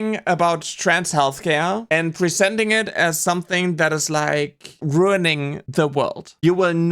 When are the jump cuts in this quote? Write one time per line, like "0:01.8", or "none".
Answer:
0:04.8
0:05.5